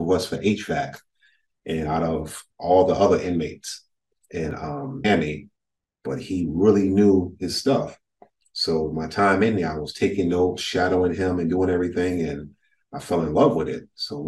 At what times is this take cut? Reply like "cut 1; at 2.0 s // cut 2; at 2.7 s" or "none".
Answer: cut 1; at 5.0 s